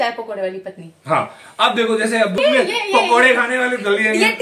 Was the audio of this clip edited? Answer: yes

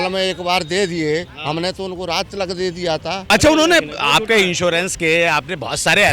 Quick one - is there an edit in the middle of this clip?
yes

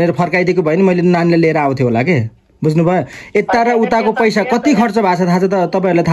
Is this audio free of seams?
yes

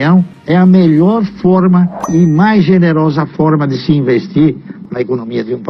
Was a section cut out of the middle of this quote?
yes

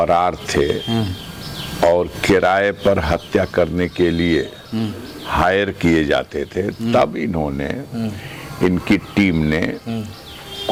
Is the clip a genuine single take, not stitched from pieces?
yes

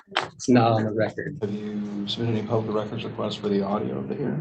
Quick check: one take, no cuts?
no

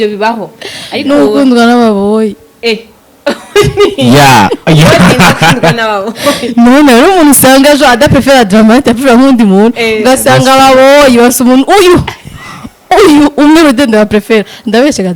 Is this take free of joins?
yes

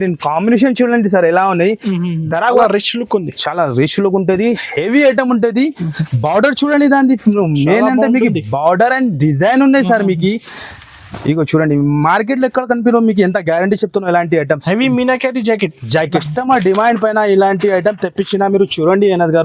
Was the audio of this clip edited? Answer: yes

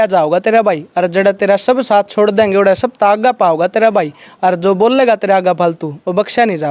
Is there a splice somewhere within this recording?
no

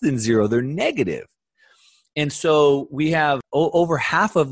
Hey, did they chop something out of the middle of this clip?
yes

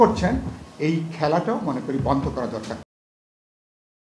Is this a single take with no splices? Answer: yes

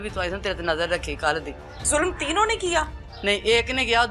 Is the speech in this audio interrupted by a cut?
yes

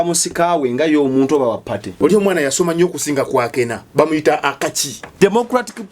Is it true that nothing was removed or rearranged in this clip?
no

